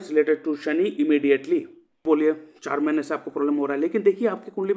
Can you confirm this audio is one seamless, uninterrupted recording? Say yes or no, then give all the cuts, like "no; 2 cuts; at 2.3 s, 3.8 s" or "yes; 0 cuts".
no; 1 cut; at 2.0 s